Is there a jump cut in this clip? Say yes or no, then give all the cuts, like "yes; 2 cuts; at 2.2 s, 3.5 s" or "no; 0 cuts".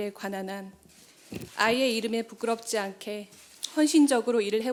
no; 0 cuts